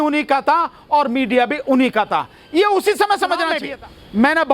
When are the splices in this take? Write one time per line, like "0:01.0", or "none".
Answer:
0:03.6